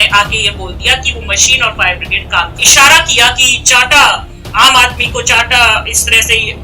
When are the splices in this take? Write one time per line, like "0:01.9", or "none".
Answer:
0:02.6